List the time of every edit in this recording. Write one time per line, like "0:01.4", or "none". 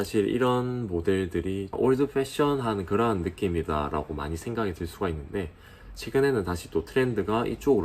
0:01.7